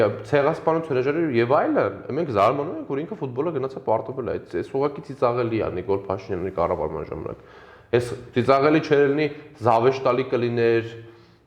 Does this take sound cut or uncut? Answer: uncut